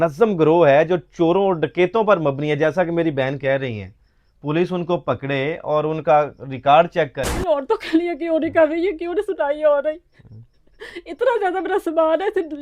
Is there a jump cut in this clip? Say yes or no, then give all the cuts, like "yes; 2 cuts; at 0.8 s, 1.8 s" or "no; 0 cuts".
yes; 1 cut; at 7.4 s